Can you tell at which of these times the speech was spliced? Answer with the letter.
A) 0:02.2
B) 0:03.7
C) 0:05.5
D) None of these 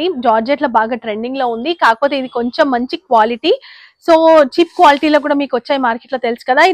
D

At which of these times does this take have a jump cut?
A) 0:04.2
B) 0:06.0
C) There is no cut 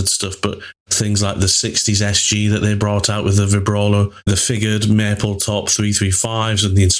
A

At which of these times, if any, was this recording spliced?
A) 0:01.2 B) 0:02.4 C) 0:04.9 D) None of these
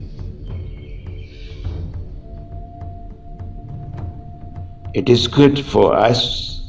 C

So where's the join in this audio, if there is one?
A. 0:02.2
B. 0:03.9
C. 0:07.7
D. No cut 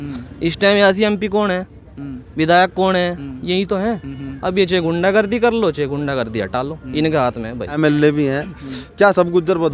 C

